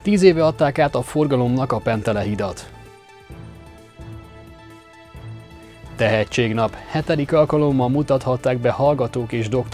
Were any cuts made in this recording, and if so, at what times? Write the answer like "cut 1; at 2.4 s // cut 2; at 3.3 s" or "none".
cut 1; at 2.6 s // cut 2; at 5.6 s